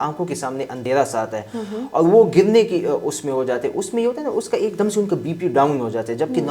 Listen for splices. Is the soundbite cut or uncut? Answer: uncut